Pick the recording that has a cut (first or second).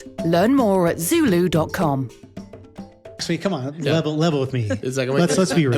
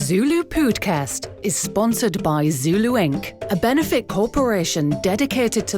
first